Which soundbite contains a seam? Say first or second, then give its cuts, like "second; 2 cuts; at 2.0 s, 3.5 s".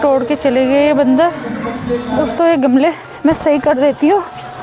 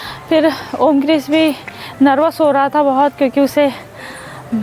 first; 1 cut; at 2.1 s